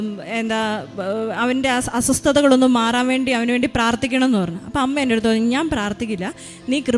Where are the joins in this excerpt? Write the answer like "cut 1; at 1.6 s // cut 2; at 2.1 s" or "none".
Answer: none